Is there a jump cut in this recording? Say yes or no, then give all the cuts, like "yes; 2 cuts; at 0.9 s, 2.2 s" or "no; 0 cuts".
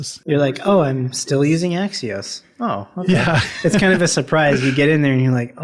no; 0 cuts